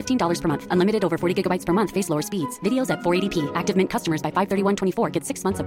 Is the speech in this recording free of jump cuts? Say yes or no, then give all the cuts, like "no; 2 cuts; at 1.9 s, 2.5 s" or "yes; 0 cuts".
yes; 0 cuts